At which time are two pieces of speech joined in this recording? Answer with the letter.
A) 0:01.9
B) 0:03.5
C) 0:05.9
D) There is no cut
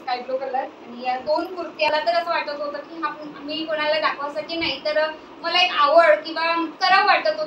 A